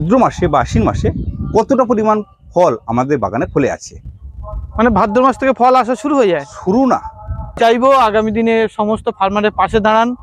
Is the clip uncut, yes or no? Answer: no